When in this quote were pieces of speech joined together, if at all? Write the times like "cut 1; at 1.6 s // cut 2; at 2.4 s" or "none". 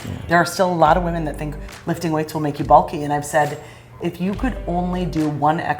cut 1; at 4.0 s

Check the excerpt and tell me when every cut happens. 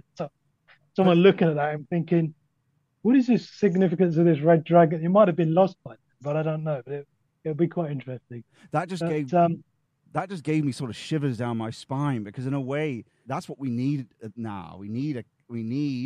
cut 1; at 13.2 s

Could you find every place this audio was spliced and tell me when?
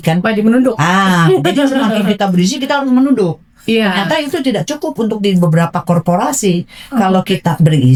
none

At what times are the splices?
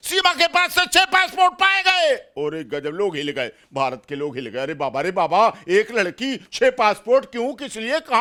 none

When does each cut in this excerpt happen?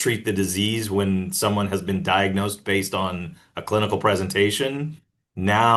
none

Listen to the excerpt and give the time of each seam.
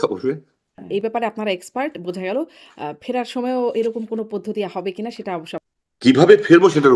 cut 1; at 0.8 s // cut 2; at 5.6 s

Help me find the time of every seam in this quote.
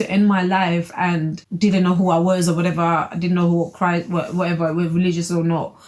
cut 1; at 1.4 s

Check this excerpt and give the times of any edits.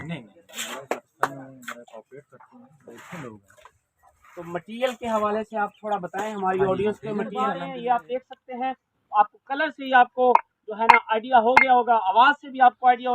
cut 1; at 7.6 s

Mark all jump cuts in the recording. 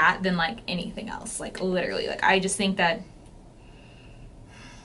none

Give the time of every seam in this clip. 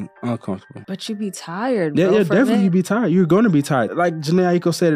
cut 1; at 0.9 s // cut 2; at 3.9 s

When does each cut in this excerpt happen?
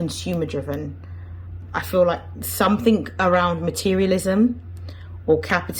cut 1; at 1.6 s

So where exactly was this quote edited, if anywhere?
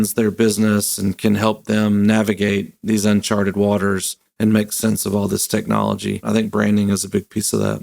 cut 1; at 6.2 s

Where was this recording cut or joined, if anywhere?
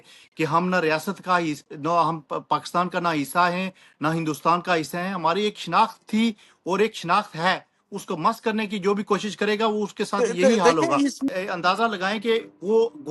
cut 1; at 11.2 s

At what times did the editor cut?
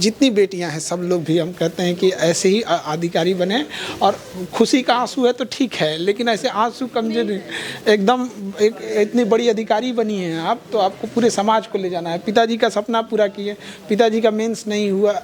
none

